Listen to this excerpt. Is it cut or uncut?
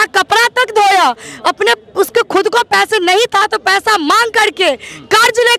uncut